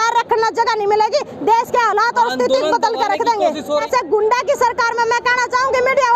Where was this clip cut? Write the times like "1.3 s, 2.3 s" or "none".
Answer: 3.7 s

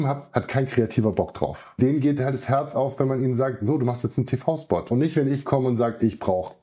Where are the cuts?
1.8 s, 4.9 s

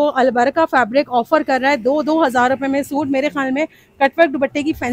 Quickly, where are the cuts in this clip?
none

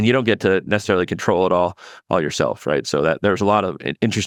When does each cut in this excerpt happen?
none

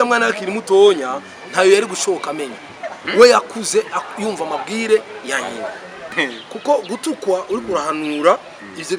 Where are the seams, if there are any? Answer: 6.1 s

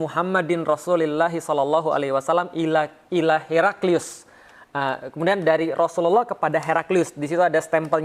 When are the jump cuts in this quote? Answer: none

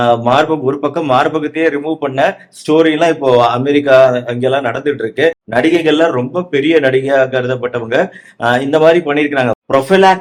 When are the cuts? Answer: none

